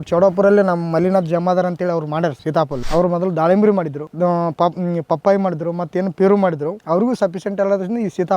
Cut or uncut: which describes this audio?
cut